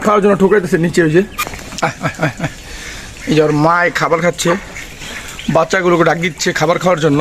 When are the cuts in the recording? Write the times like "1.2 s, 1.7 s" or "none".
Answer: 1.4 s